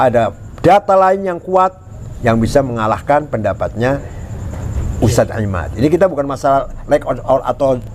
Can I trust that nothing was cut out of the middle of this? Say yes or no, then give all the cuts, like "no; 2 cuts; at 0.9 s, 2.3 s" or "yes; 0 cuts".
yes; 0 cuts